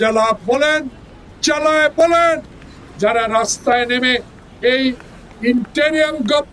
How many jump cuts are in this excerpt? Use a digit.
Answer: 1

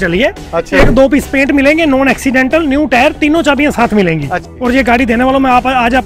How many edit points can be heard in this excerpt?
1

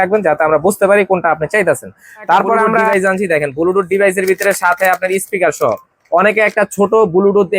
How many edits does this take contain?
1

